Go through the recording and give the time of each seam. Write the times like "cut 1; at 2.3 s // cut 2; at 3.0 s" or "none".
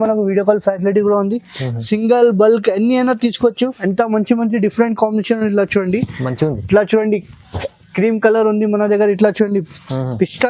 cut 1; at 3.8 s